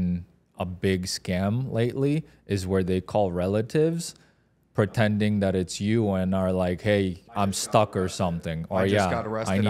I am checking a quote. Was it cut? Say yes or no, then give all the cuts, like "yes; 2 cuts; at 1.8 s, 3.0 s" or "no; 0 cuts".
no; 0 cuts